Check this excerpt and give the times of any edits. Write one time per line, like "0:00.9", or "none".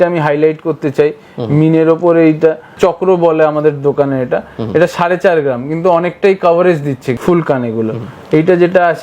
0:02.8
0:07.2